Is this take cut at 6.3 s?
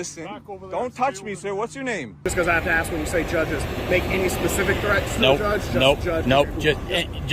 no; 1 cut; at 2.1 s

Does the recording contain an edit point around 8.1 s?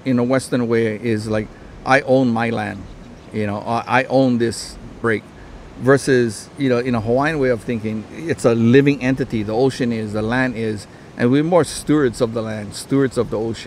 yes; 2 cuts; at 4.9 s, 8.1 s

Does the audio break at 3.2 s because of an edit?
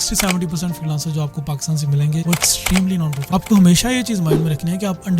yes; 1 cut; at 3.2 s

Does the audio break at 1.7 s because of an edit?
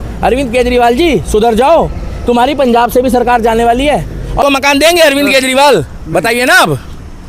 no; 1 cut; at 4.4 s

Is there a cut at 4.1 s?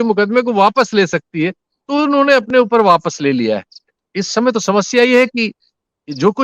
yes; 1 cut; at 4.1 s

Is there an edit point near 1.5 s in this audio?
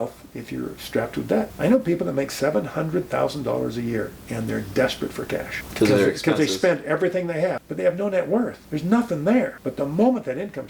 yes; 5 cuts; at 1.5 s, 5.6 s, 7.7 s, 8.6 s, 9.6 s

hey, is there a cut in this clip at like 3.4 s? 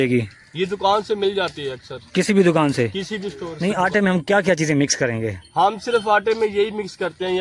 yes; 1 cut; at 3.4 s

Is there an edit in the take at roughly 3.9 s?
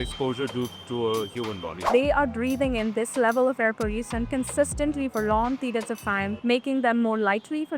no; 2 cuts; at 1.8 s, 6.3 s

